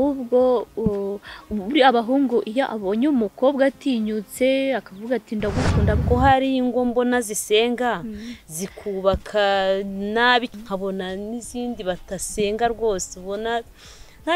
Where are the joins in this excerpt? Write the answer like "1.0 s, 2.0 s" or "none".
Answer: 6.0 s, 10.5 s